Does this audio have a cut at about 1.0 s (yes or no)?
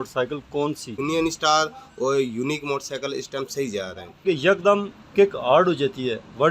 yes